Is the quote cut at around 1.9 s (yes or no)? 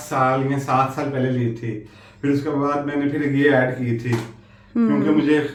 no